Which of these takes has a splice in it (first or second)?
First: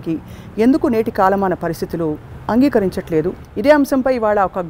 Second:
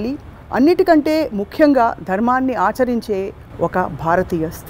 first